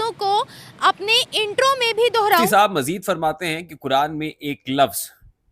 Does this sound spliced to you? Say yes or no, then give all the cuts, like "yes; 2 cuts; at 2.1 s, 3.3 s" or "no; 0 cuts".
yes; 1 cut; at 2.5 s